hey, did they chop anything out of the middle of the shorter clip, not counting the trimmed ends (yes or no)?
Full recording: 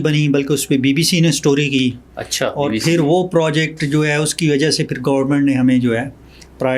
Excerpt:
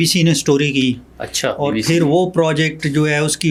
no